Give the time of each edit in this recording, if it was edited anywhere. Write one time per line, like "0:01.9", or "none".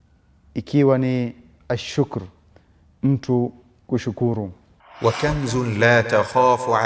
0:04.8